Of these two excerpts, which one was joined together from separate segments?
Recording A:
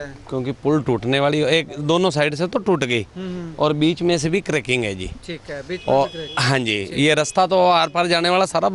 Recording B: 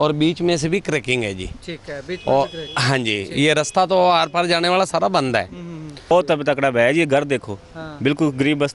B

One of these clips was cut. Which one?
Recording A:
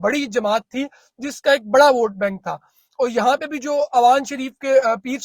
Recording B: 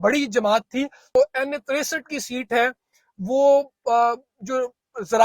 B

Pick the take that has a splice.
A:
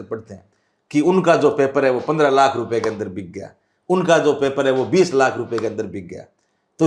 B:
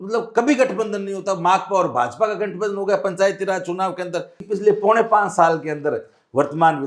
B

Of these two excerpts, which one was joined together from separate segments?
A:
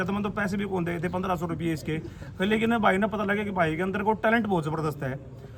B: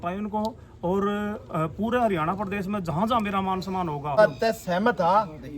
B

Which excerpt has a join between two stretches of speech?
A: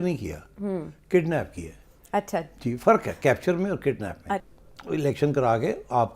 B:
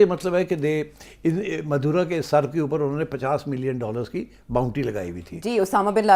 A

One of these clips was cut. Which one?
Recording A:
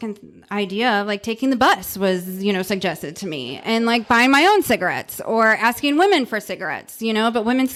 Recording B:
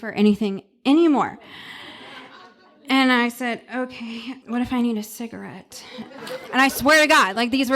B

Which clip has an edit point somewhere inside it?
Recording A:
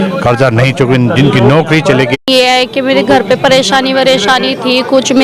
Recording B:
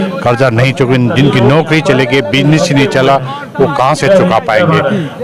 A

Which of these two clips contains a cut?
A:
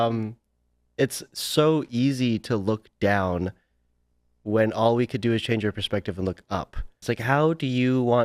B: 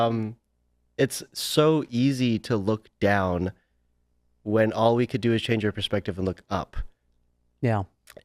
A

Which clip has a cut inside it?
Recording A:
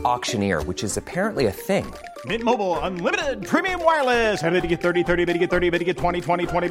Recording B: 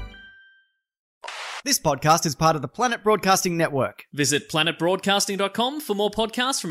B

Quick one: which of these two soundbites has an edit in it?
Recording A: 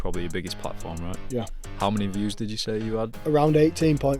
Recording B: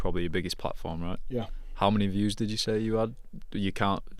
A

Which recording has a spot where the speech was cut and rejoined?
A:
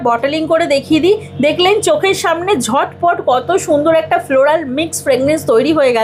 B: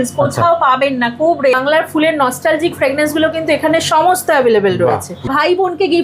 B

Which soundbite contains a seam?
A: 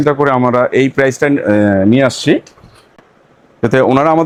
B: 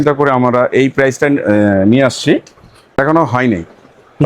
B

